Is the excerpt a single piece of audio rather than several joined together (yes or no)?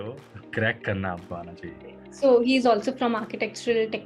yes